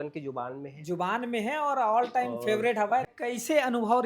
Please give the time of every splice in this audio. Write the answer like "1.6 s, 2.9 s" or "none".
3.1 s